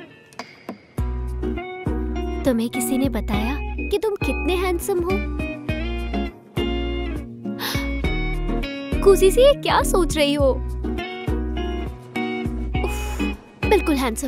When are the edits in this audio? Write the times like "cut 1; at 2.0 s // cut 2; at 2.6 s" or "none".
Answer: none